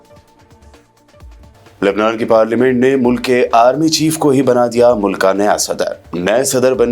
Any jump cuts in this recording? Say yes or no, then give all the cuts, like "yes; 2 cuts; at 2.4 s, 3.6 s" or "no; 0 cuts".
yes; 1 cut; at 1.3 s